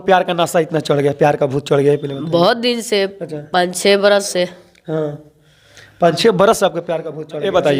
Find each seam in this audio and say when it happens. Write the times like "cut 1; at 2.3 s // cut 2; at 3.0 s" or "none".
none